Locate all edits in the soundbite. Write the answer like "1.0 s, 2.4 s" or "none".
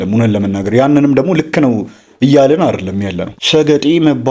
3.3 s